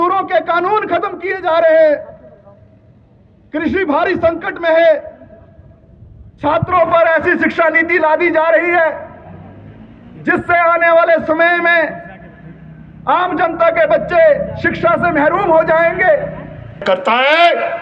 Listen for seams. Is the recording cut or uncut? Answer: cut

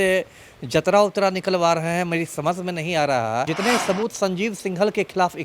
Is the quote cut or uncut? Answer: cut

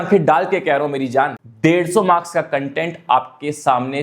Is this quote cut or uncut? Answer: cut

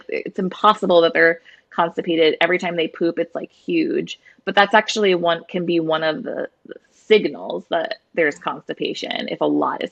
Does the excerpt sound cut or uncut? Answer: uncut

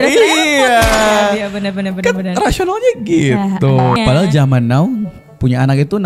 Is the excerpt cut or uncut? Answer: cut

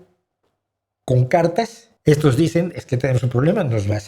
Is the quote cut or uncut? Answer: cut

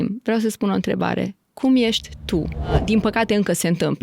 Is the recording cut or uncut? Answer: cut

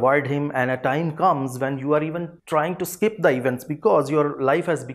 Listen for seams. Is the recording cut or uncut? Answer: cut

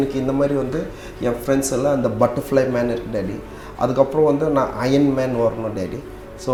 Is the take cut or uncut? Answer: uncut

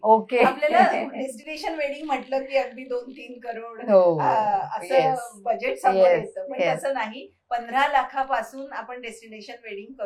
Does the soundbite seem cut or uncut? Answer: uncut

